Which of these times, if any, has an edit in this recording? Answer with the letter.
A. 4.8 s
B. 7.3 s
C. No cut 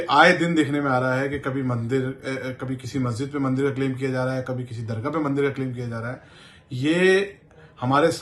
C